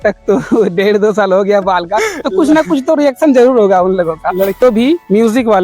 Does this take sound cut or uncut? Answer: cut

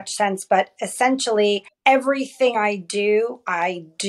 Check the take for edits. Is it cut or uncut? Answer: cut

